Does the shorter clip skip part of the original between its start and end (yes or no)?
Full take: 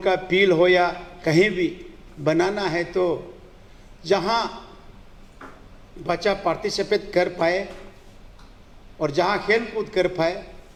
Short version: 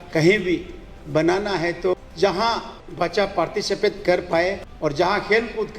yes